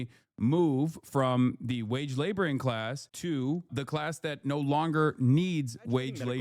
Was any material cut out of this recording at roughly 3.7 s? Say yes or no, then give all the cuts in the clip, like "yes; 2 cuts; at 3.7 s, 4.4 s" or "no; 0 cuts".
yes; 1 cut; at 3.7 s